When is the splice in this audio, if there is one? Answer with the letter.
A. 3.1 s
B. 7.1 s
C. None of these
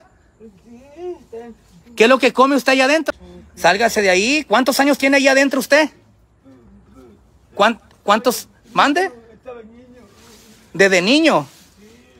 A